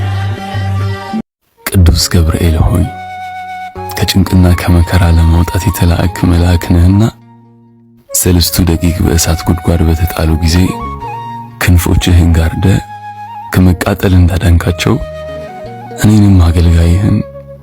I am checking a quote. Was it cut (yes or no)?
yes